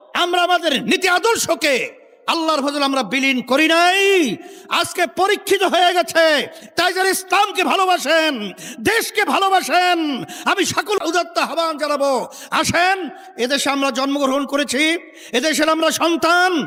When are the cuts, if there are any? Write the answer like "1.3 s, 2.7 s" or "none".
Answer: none